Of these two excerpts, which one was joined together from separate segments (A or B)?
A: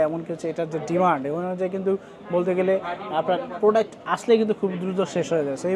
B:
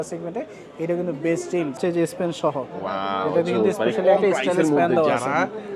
B